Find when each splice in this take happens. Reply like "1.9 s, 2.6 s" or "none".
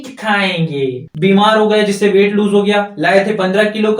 1.1 s